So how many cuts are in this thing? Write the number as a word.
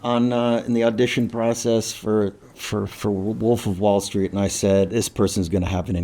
one